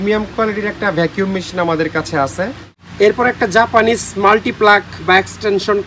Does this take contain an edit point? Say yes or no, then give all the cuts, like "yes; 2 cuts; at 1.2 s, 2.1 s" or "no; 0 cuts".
yes; 1 cut; at 2.7 s